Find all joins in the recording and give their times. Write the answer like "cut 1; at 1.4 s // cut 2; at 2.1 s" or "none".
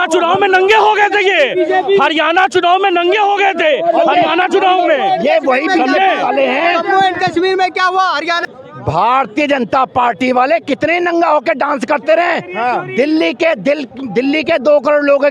none